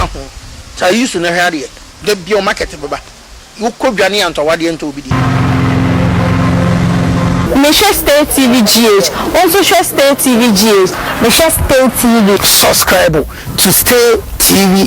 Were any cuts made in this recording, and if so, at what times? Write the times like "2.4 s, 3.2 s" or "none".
5.0 s